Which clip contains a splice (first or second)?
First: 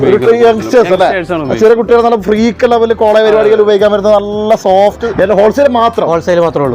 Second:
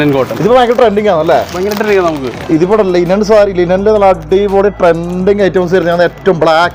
first